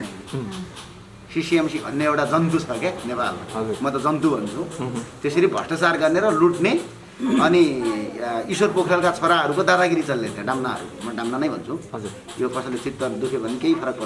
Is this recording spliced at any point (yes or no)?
no